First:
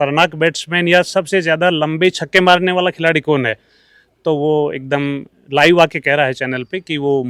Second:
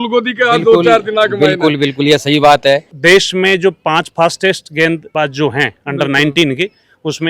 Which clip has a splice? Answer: second; 1 cut; at 2.9 s

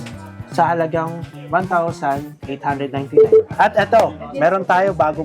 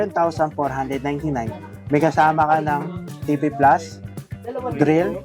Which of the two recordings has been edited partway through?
first; 1 cut; at 3.5 s

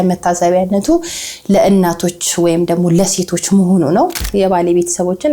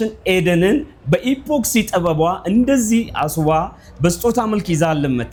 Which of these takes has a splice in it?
first; 1 cut; at 4.2 s

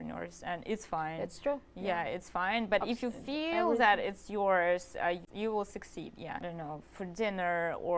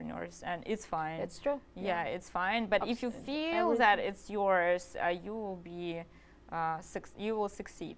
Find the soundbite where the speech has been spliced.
first; 2 cuts; at 5.2 s, 6.4 s

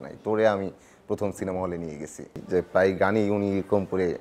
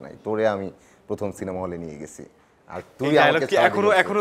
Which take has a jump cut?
first; 1 cut; at 2.3 s

